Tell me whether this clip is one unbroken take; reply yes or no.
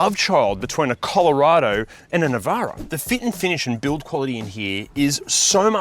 no